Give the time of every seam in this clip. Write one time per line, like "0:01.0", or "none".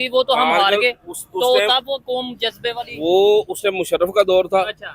none